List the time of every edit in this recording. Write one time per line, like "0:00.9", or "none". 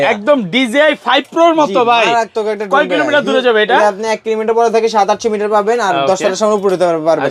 none